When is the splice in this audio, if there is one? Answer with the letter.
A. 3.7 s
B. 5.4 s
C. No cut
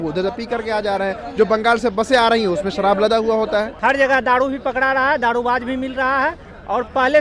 A